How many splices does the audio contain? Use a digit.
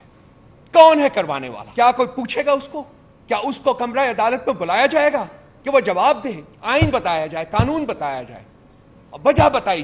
2